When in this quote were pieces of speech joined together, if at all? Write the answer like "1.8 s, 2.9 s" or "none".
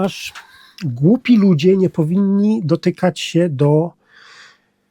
none